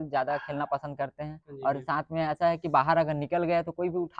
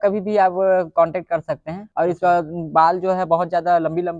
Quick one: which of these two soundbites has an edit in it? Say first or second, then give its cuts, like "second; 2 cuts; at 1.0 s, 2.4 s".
second; 1 cut; at 1.8 s